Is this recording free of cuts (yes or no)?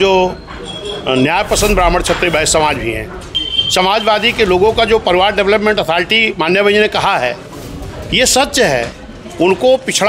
no